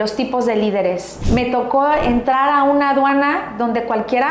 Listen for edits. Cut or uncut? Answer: cut